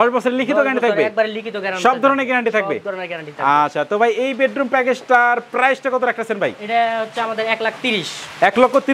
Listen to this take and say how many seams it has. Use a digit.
0